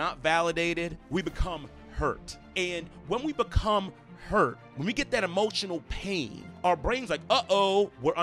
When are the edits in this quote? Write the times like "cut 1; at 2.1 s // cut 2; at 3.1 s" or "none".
cut 1; at 6.4 s